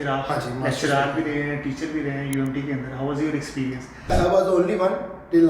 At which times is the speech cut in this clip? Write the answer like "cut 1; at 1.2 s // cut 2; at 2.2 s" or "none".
cut 1; at 4.1 s